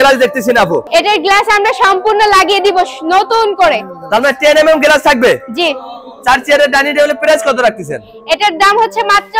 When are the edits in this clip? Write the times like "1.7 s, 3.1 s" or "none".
none